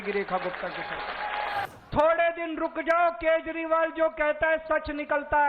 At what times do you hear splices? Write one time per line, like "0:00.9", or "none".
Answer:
0:01.7

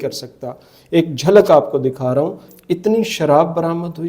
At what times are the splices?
0:02.5

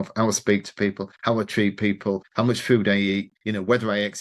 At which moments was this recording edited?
0:01.1
0:02.3
0:03.4

